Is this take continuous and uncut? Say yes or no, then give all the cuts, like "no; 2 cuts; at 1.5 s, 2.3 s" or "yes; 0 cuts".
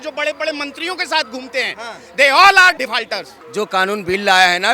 no; 1 cut; at 3.0 s